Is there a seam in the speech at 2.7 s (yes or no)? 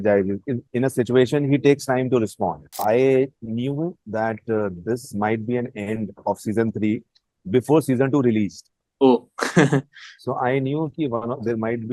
yes